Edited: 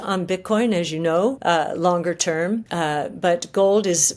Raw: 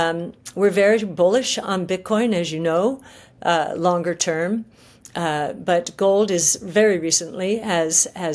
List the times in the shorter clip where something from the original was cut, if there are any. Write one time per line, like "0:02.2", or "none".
0:01.4
0:02.7